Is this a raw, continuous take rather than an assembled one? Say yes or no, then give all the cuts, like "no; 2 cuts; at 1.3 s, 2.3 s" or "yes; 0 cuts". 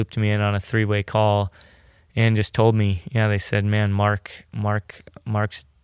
yes; 0 cuts